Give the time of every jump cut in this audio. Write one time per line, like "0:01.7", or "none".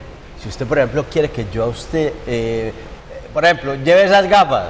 none